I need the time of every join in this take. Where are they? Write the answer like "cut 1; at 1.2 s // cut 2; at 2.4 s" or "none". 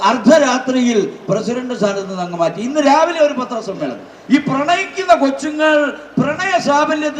cut 1; at 4.1 s